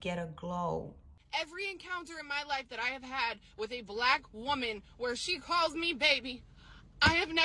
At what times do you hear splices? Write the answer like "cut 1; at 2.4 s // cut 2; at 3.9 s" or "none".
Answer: cut 1; at 1.1 s